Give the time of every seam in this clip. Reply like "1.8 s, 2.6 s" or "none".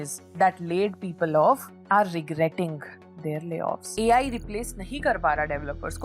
3.9 s